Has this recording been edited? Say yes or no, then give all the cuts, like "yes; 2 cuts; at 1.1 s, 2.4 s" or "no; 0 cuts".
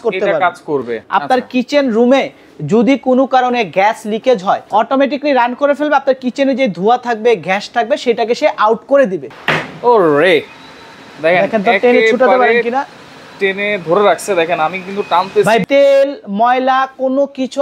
yes; 4 cuts; at 1.0 s, 4.6 s, 9.2 s, 15.6 s